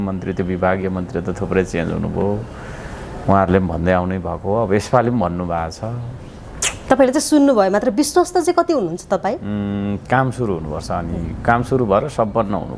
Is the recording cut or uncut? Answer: uncut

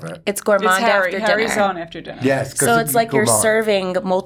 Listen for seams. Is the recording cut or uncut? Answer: uncut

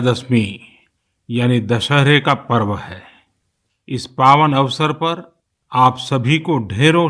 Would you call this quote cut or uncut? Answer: cut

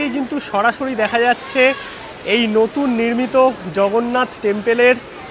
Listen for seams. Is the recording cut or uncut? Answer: uncut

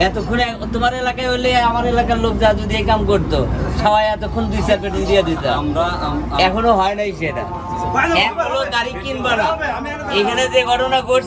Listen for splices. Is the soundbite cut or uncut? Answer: uncut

